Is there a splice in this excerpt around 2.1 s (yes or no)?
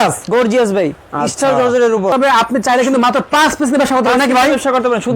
yes